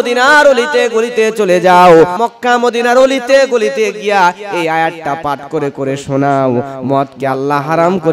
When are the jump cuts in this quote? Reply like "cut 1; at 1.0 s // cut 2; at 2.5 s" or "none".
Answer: cut 1; at 2.2 s